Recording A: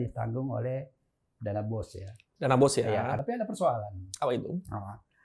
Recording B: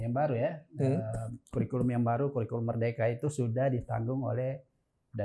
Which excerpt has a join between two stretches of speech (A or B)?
A